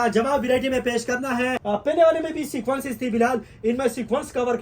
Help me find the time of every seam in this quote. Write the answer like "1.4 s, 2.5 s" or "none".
1.6 s